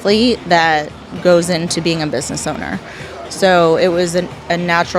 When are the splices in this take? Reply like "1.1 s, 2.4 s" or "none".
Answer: none

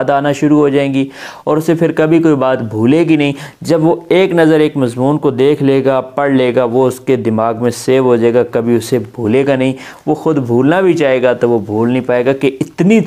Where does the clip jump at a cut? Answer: none

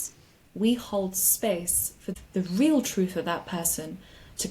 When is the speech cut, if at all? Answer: 2.1 s

